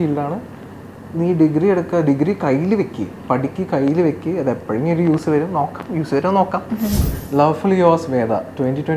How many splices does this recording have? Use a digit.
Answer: 1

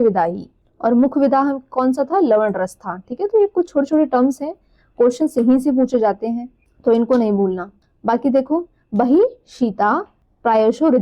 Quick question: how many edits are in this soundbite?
0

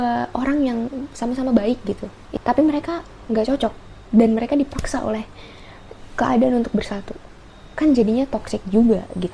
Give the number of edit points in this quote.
1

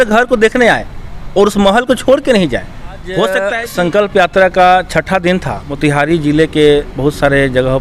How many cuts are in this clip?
2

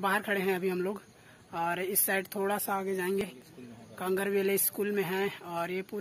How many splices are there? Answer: 1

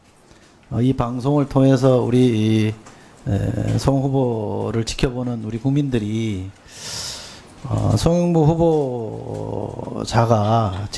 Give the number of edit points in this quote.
1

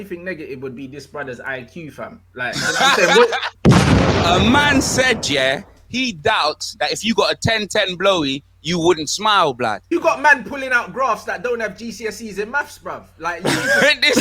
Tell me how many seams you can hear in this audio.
2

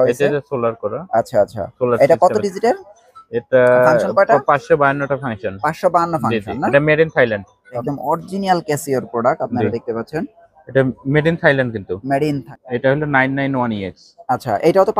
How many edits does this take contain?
2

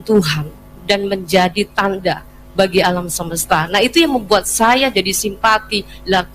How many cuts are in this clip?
0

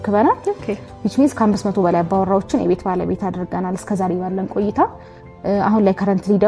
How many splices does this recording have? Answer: 0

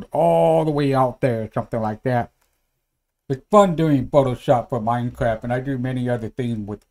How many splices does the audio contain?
1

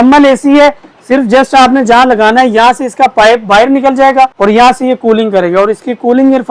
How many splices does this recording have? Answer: 1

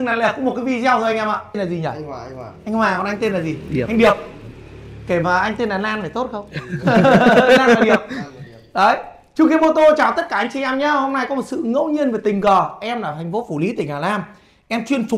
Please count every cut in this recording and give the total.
1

